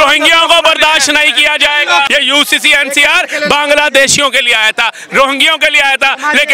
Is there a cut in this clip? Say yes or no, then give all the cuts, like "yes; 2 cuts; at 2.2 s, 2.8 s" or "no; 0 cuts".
yes; 1 cut; at 2.1 s